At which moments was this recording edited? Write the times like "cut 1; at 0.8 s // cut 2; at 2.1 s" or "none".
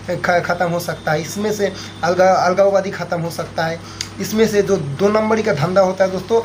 none